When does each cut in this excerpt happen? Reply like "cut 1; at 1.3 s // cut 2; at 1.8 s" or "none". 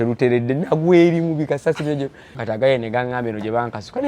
cut 1; at 2.4 s